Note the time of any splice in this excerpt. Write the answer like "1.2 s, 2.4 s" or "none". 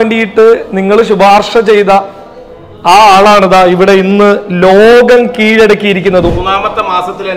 6.3 s